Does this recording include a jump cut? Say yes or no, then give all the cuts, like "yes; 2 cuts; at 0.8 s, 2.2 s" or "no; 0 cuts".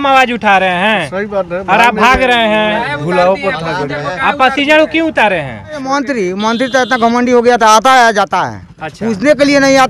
yes; 1 cut; at 5.9 s